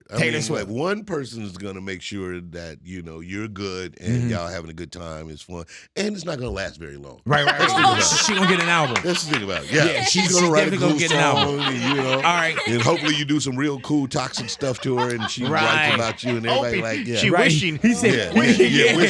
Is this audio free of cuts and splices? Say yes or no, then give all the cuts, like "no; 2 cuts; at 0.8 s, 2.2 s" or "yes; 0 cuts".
yes; 0 cuts